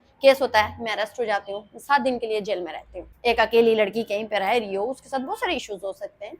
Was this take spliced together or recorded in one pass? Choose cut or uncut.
cut